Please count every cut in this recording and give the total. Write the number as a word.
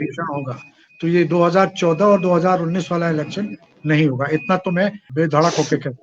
one